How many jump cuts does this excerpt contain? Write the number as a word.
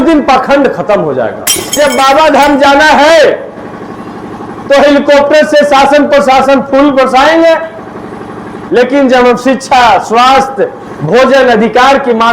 one